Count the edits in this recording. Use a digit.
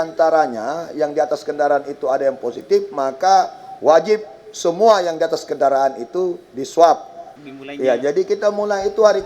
1